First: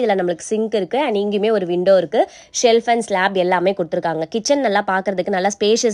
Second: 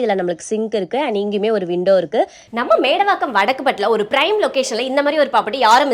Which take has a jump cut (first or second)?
second